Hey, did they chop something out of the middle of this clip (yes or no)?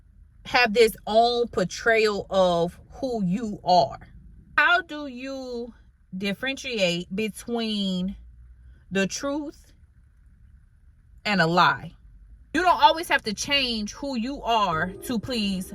yes